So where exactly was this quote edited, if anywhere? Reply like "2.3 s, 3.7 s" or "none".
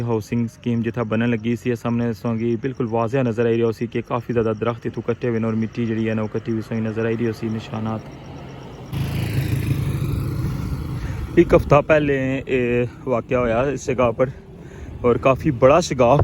8.9 s